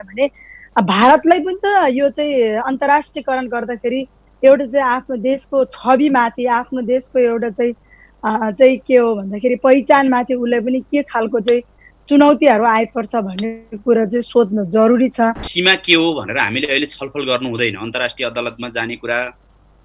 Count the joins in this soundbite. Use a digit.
1